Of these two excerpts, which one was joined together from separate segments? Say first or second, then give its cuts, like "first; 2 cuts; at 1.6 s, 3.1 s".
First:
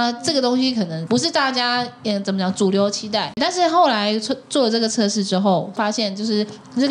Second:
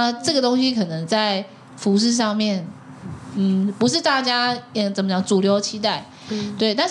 first; 3 cuts; at 1.0 s, 3.4 s, 5.8 s